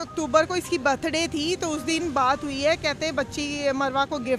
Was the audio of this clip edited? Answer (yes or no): no